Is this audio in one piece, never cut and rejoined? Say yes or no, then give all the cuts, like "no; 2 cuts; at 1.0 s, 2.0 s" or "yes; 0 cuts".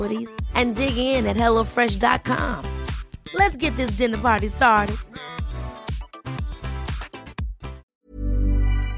no; 1 cut; at 7.9 s